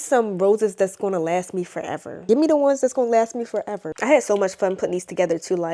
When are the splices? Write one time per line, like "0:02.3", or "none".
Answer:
none